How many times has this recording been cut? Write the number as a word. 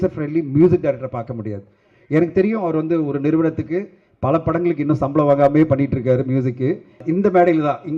one